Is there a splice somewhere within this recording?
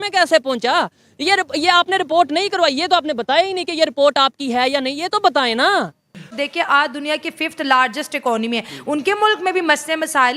yes; 1 cut; at 6.0 s

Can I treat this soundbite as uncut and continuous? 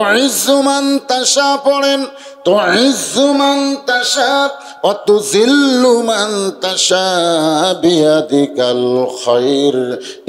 yes; 0 cuts

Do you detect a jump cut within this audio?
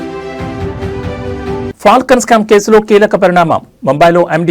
yes; 1 cut; at 1.4 s

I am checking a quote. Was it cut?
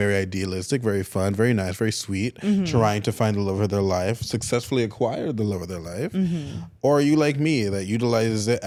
no; 0 cuts

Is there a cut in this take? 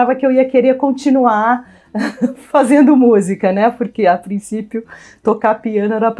no; 0 cuts

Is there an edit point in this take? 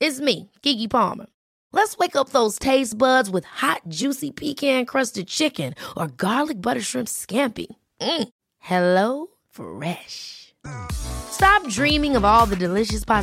no; 0 cuts

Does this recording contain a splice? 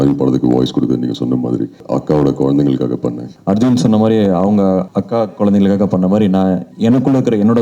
yes; 4 cuts; at 1.8 s, 3.3 s, 4.9 s, 6.7 s

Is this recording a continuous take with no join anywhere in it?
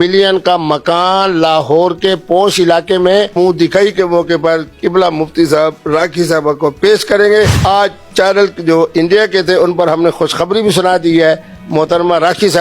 no; 2 cuts; at 3.3 s, 7.6 s

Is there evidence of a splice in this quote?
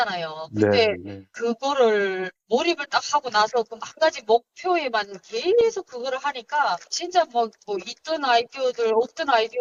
no; 0 cuts

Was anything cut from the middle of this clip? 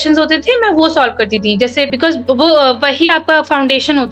yes; 1 cut; at 1.9 s

